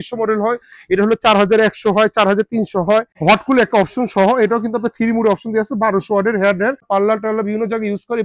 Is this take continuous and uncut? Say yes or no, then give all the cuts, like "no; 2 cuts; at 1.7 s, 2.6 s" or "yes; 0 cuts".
no; 2 cuts; at 3.1 s, 6.8 s